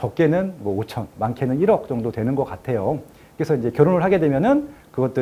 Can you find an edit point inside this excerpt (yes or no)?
no